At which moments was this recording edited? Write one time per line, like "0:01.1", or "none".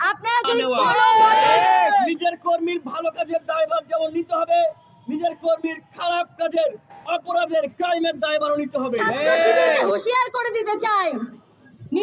0:00.9
0:09.8